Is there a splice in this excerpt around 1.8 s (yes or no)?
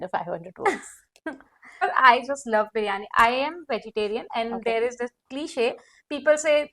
yes